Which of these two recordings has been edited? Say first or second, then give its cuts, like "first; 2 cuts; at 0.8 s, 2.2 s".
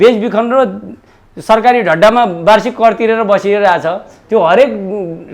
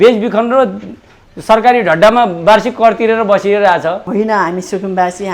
second; 1 cut; at 4.0 s